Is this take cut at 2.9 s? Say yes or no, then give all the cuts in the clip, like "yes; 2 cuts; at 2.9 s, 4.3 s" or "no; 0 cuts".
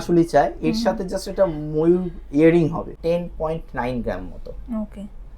yes; 1 cut; at 2.9 s